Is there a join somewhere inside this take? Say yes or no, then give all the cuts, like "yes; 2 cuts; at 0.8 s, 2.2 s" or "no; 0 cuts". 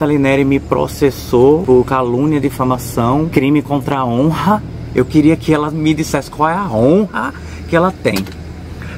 yes; 2 cuts; at 1.6 s, 3.3 s